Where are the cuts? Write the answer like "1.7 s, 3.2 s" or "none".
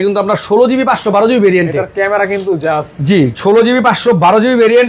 none

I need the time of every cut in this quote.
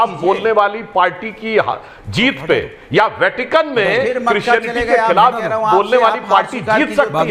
none

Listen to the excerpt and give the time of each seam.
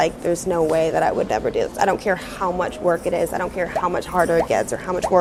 none

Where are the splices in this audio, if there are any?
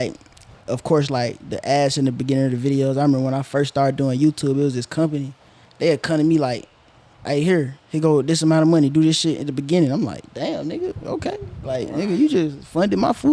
none

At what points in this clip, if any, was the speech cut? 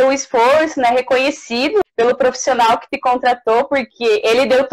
1.8 s

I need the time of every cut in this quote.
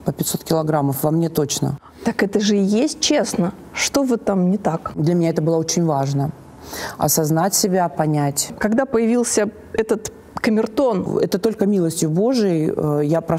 1.7 s, 5.0 s, 8.5 s, 11.1 s

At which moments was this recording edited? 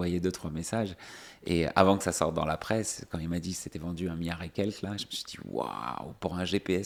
none

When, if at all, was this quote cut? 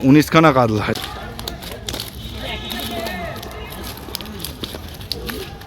1.0 s

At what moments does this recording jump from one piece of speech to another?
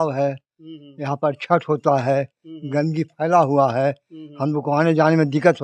none

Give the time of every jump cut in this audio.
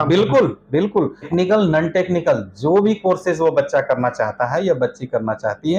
1.3 s

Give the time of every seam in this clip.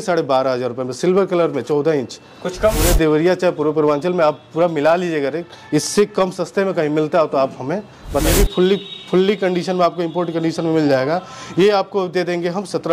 2.8 s, 8.3 s

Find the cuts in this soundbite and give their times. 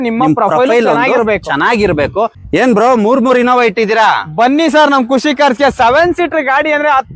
2.4 s

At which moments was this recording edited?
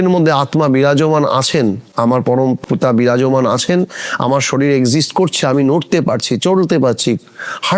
2.6 s

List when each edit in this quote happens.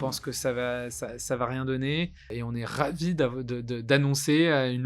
2.3 s

